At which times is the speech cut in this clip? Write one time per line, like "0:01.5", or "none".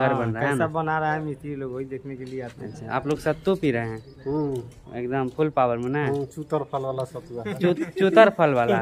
none